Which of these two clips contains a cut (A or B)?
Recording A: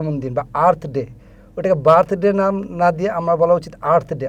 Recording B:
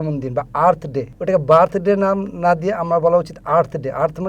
B